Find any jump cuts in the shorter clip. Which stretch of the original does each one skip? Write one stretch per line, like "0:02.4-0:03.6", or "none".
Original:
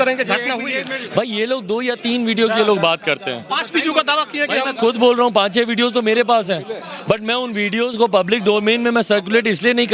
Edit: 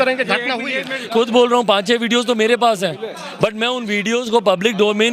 0:01.1-0:04.7